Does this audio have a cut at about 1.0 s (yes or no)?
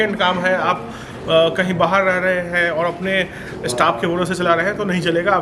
no